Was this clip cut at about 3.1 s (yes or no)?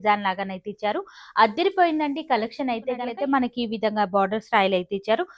yes